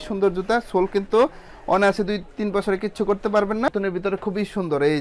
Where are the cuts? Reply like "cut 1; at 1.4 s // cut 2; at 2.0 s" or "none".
cut 1; at 3.7 s

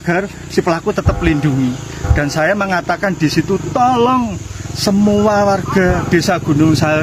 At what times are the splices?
none

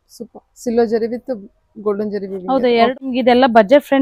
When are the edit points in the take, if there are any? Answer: cut 1; at 2.9 s

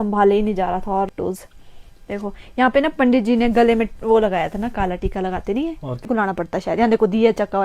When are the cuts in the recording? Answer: cut 1; at 1.1 s // cut 2; at 6.1 s

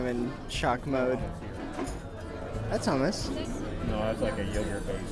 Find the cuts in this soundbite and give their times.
cut 1; at 2.4 s // cut 2; at 3.5 s

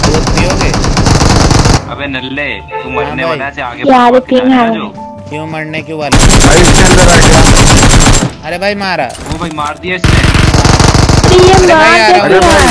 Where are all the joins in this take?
cut 1; at 1.8 s

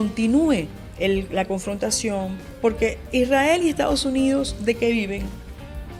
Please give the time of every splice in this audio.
none

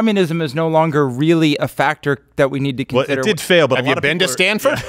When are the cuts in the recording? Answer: none

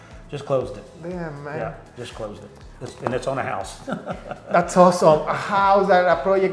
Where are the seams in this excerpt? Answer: none

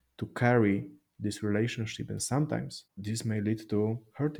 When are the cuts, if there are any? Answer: cut 1; at 2.8 s

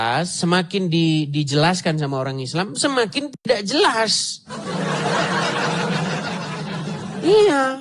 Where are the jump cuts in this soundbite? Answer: none

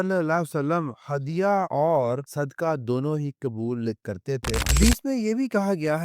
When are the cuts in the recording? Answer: cut 1; at 4.7 s

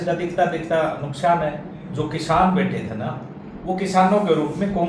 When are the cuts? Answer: cut 1; at 1.8 s

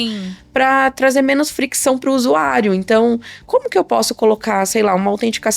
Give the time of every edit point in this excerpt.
none

